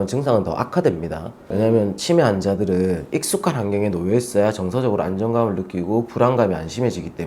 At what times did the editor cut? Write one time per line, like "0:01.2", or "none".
0:01.4